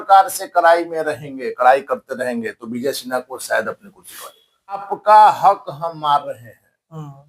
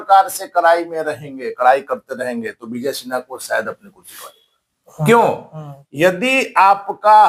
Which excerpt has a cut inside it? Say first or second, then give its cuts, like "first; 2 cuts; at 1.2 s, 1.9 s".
first; 1 cut; at 4.9 s